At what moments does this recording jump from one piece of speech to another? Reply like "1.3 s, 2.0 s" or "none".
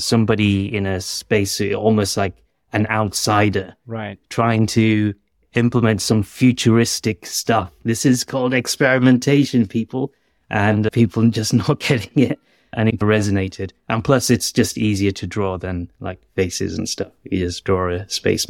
7.8 s, 10.9 s, 12.8 s